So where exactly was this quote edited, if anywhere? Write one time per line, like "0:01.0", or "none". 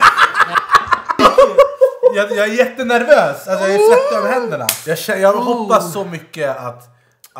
0:01.2
0:04.7

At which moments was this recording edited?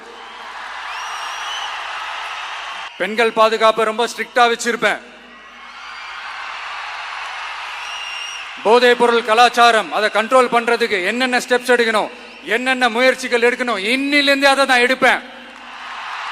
0:02.9

